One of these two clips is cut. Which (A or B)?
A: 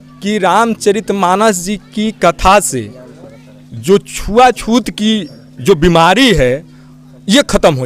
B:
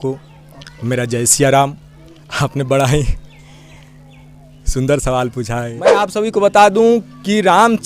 B